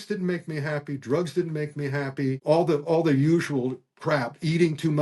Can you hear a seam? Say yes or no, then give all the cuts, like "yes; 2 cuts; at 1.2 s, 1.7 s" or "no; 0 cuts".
yes; 1 cut; at 2.4 s